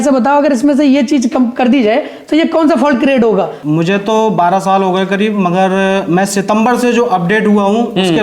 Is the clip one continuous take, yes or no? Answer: no